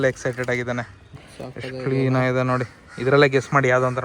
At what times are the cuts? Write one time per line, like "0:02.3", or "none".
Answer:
0:01.0